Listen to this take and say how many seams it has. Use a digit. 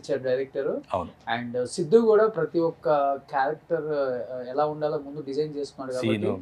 0